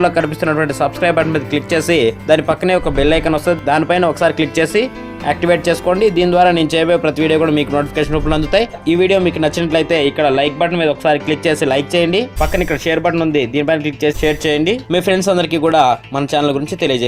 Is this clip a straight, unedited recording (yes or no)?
no